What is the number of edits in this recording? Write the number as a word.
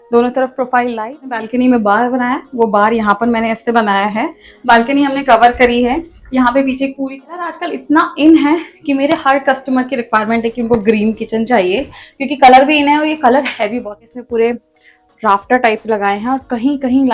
three